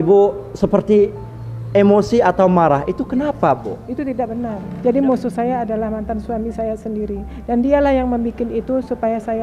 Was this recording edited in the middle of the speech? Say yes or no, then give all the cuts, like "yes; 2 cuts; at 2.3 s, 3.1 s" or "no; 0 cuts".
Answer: yes; 1 cut; at 4.6 s